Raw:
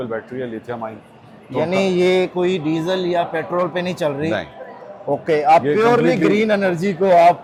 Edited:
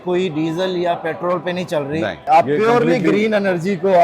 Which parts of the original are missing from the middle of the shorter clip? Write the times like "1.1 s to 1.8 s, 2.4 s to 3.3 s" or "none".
4.5 s to 5.4 s